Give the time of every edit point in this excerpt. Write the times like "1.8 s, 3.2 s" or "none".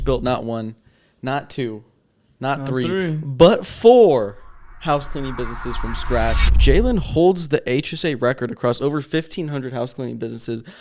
6.5 s